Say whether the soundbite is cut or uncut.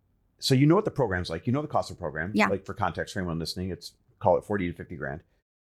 uncut